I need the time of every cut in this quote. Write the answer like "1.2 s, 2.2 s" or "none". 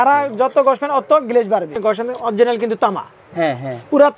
1.7 s